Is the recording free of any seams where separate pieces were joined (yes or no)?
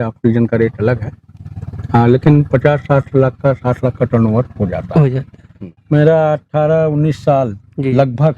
no